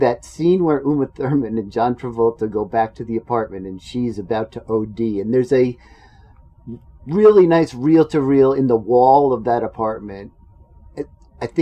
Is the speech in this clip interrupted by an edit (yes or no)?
no